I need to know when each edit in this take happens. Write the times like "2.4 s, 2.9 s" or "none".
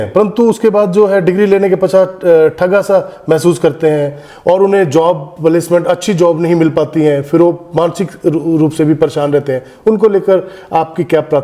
none